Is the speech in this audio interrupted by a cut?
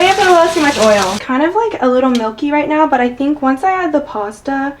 yes; 1 cut; at 1.2 s

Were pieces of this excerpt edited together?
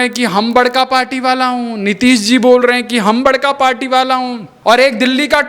yes; 1 cut; at 4.5 s

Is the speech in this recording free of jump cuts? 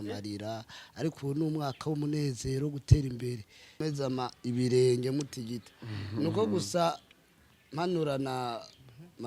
no; 1 cut; at 3.8 s

